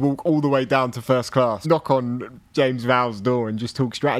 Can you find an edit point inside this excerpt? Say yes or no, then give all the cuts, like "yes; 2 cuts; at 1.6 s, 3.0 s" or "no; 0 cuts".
yes; 1 cut; at 1.6 s